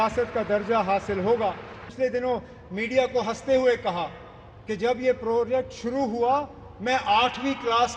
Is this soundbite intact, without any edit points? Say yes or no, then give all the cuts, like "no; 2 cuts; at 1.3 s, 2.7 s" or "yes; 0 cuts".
no; 1 cut; at 1.9 s